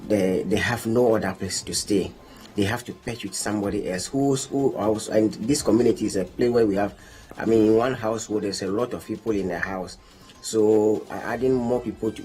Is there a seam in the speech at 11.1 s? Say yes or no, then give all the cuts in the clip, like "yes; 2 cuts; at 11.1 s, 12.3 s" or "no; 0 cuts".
yes; 1 cut; at 11.1 s